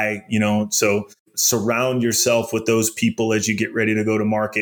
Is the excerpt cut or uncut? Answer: cut